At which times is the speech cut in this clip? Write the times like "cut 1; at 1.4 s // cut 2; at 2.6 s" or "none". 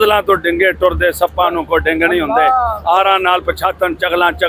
none